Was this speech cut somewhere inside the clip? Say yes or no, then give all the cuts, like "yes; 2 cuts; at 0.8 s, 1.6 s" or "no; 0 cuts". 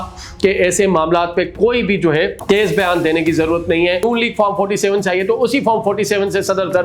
yes; 2 cuts; at 2.4 s, 4.0 s